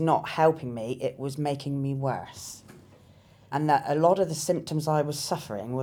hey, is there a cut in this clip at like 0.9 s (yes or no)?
no